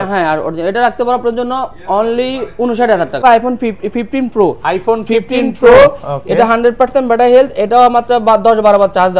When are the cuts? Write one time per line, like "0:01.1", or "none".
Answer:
0:03.2

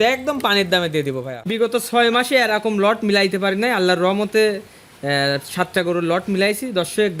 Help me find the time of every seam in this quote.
0:01.5

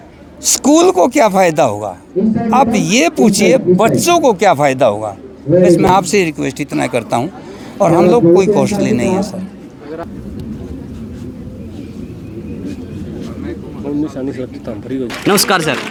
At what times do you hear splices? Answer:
none

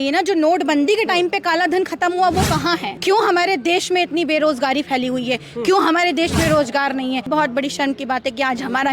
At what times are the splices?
0:02.9
0:07.3

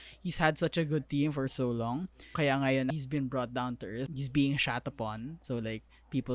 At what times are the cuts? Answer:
0:02.3
0:02.9
0:04.1

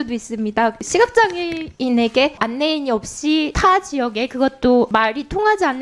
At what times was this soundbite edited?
0:00.8
0:02.4
0:03.5
0:04.9

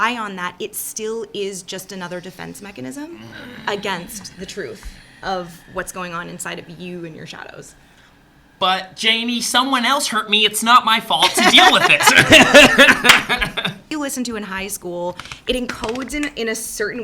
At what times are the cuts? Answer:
0:13.9

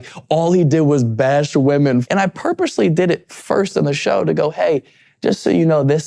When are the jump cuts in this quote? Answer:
0:02.0

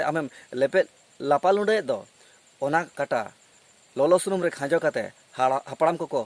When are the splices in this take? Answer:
none

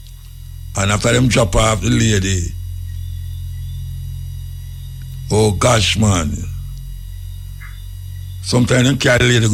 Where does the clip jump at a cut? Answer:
none

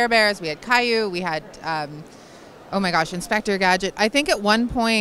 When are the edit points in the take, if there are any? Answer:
none

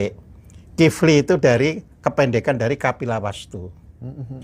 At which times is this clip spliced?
none

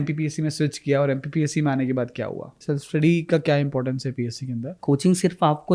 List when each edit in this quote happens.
0:02.6
0:04.8

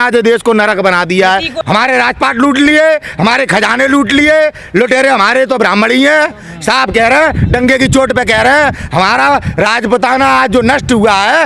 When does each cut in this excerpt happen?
0:01.5

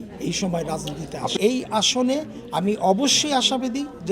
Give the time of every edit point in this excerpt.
0:01.4

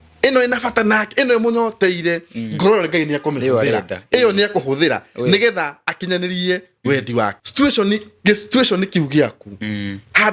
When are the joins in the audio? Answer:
0:07.4

